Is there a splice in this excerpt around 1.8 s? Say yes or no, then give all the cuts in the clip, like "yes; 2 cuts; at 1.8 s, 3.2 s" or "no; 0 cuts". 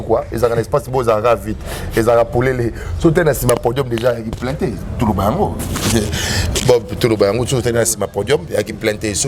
no; 0 cuts